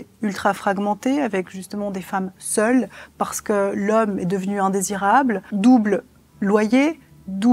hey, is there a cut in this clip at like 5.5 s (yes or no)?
yes